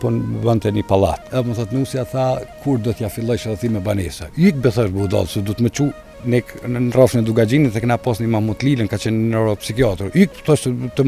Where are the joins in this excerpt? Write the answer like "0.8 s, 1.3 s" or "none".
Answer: 1.2 s